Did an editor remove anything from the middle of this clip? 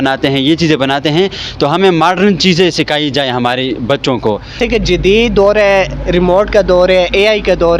yes; 1 cut; at 4.6 s

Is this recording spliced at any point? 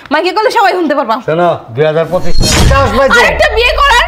yes; 1 cut; at 2.6 s

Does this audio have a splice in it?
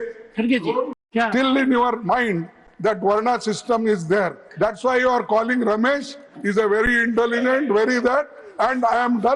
yes; 1 cut; at 1.0 s

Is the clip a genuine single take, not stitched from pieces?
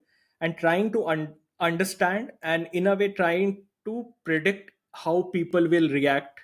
yes; 0 cuts

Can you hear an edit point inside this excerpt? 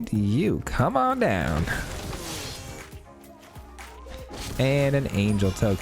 yes; 1 cut; at 2.8 s

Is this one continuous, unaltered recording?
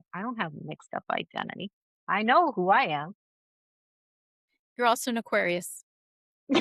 yes; 0 cuts

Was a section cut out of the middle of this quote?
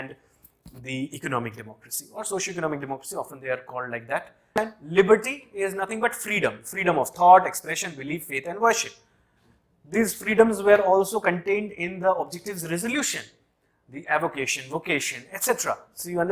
yes; 1 cut; at 4.6 s

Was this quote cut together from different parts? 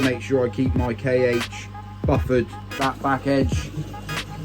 yes; 1 cut; at 2.8 s

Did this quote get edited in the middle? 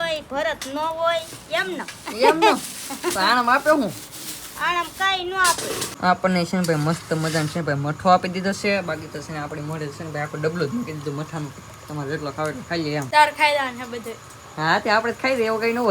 yes; 2 cuts; at 5.9 s, 13.1 s

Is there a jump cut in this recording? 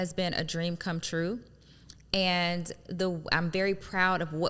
no; 0 cuts

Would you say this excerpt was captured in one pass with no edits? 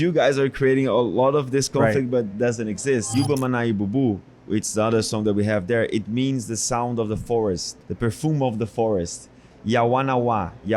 no; 3 cuts; at 3.1 s, 7.7 s, 9.5 s

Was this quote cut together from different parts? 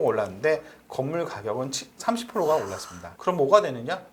no; 0 cuts

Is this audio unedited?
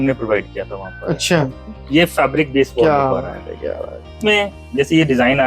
no; 2 cuts; at 1.6 s, 4.2 s

